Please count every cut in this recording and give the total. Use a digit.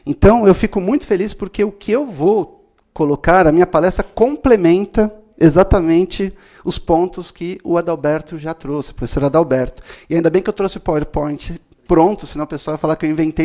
1